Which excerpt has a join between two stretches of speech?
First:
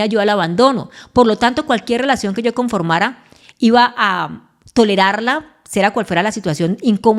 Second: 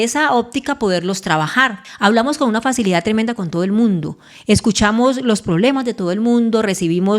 second; 1 cut; at 1.8 s

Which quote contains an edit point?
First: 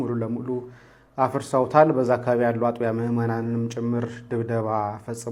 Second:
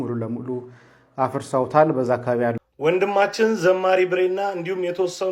second; 1 cut; at 2.6 s

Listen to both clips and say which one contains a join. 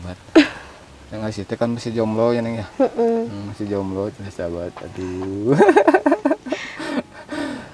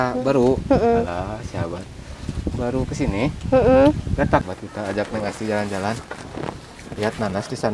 second; 1 cut; at 4.4 s

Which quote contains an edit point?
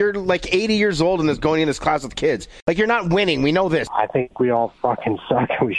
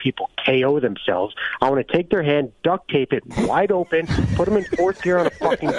first; 2 cuts; at 2.5 s, 3.9 s

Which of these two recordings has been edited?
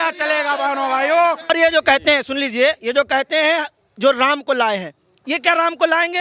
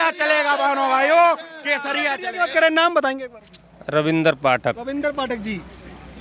first; 1 cut; at 1.5 s

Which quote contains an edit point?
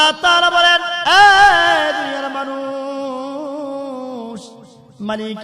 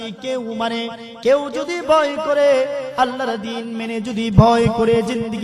first; 1 cut; at 0.9 s

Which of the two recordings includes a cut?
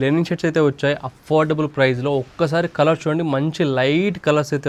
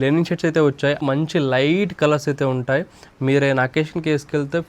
second; 1 cut; at 1.0 s

